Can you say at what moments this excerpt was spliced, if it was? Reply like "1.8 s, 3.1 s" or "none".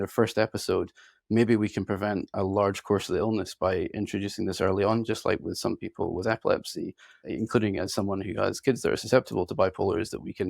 7.2 s